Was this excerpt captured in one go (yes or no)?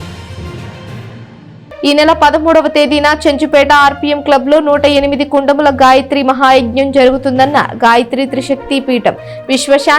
no